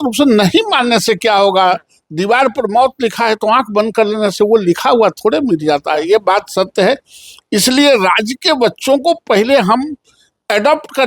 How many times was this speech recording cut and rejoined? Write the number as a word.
zero